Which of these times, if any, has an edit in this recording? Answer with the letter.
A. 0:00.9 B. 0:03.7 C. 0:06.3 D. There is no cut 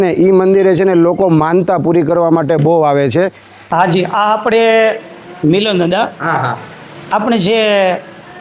B